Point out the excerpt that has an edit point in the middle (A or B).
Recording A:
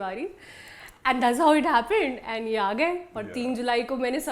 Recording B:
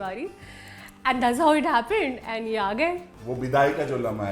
B